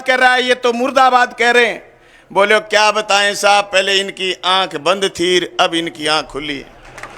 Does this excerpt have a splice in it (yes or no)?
no